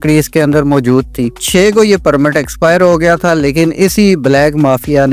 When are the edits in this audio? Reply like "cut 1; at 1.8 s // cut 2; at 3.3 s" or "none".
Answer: cut 1; at 1.4 s